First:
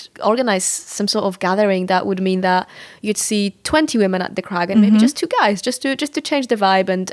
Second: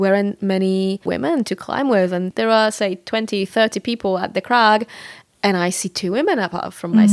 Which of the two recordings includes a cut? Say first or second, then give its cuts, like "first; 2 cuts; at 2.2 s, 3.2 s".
second; 2 cuts; at 1.0 s, 2.3 s